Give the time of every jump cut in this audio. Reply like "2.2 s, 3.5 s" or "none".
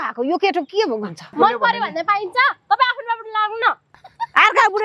1.3 s

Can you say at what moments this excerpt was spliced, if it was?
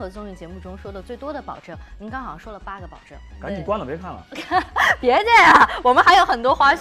3.3 s

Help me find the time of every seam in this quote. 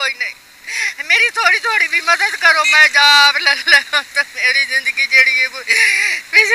none

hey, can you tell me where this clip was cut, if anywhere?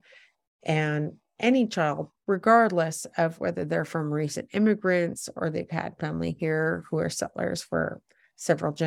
none

